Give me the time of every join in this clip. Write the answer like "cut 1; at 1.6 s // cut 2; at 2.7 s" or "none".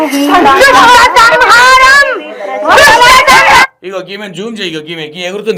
none